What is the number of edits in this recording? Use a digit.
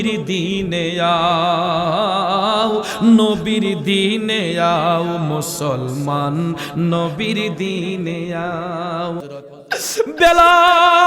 1